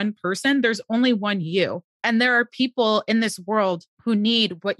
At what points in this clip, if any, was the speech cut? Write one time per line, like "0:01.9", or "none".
0:01.9
0:03.9

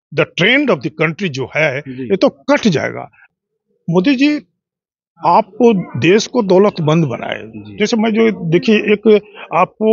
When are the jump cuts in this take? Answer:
0:03.2

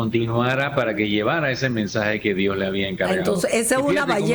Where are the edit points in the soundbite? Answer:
none

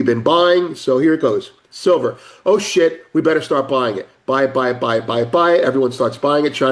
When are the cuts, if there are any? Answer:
none

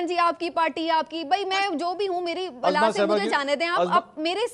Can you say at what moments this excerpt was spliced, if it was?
none

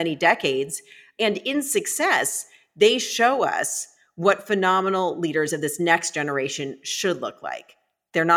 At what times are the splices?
0:01.1

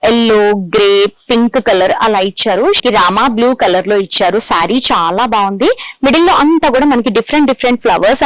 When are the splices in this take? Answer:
0:02.8

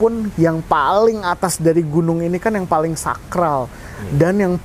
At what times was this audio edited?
none

